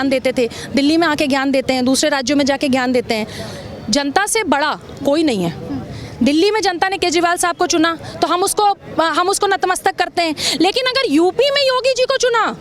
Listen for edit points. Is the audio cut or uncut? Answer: uncut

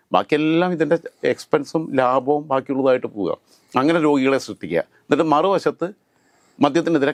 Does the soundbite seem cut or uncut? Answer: uncut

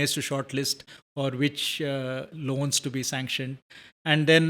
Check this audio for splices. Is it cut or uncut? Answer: uncut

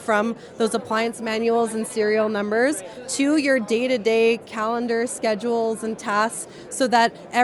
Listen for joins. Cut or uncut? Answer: uncut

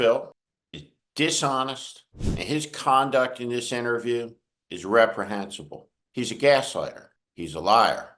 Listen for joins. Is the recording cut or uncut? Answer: uncut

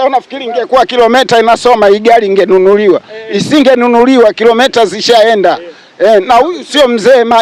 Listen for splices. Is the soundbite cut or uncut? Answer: uncut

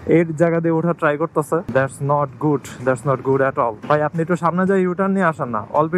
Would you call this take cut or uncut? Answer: cut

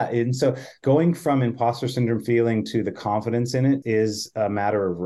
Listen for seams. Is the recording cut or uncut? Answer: cut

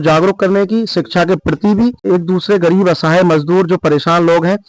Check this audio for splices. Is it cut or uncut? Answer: cut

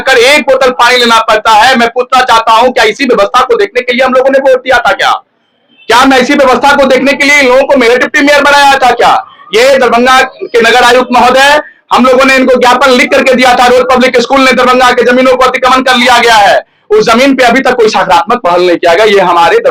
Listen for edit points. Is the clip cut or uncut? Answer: uncut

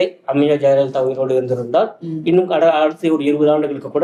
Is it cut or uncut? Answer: uncut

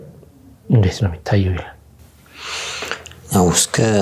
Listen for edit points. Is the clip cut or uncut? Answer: uncut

